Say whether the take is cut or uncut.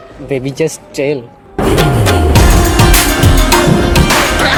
uncut